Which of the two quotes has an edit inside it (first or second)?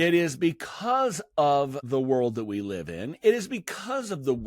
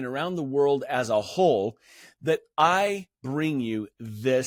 first